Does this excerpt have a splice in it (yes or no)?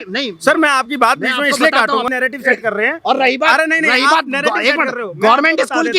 yes